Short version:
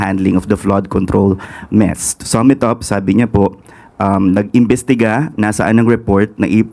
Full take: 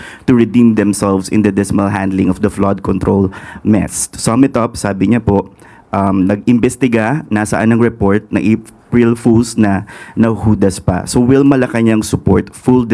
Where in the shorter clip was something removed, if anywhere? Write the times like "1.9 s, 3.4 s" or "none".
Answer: none